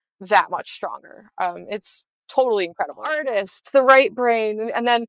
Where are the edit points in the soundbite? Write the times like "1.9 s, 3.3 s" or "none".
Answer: 3.3 s